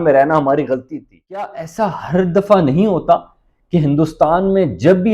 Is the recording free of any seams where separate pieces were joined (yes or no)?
no